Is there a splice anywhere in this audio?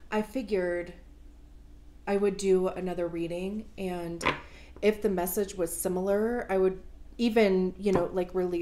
no; 0 cuts

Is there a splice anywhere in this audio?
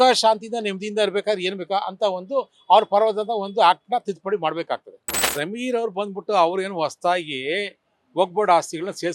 yes; 1 cut; at 5.3 s

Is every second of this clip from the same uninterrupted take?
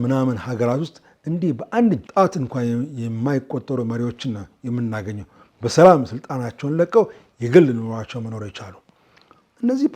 no; 1 cut; at 2.1 s

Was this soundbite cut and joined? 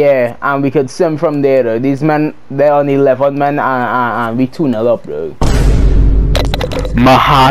no; 0 cuts

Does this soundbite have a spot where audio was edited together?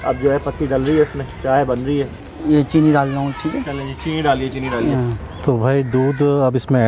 no; 0 cuts

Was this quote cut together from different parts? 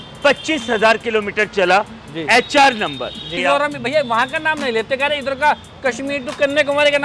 yes; 1 cut; at 3.3 s

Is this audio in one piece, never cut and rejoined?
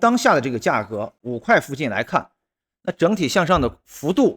no; 1 cut; at 1.1 s

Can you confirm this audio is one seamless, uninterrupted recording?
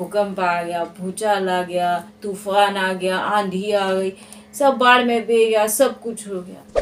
yes; 0 cuts

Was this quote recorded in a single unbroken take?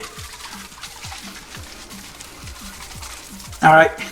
yes; 0 cuts

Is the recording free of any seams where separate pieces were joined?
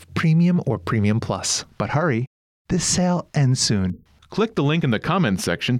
no; 1 cut; at 1.6 s

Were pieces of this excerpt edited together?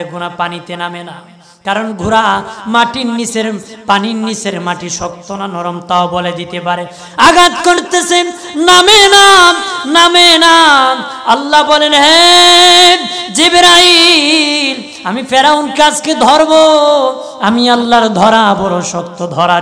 no; 0 cuts

